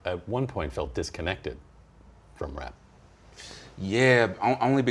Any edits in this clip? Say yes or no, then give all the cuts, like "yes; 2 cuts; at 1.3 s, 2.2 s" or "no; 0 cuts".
no; 0 cuts